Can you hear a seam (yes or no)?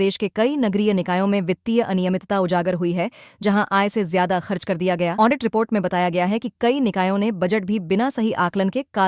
no